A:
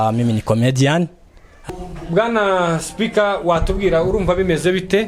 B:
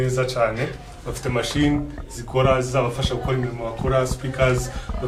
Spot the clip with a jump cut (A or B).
A